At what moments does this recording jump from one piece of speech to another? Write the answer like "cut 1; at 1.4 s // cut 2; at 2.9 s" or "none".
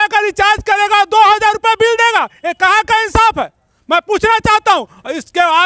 none